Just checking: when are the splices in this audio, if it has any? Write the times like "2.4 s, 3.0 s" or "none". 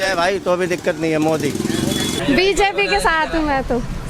2.1 s